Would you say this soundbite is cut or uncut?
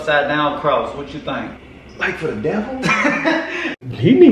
uncut